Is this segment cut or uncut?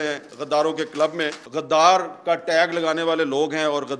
cut